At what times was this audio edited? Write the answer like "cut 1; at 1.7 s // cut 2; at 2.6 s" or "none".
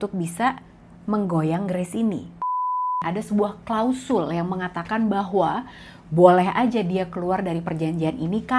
cut 1; at 2.8 s